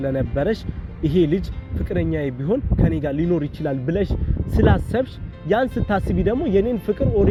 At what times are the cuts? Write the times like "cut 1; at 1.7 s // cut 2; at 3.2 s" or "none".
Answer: none